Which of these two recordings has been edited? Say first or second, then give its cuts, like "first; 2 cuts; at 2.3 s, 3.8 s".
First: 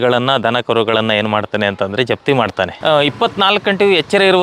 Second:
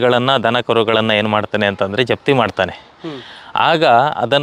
first; 1 cut; at 2.7 s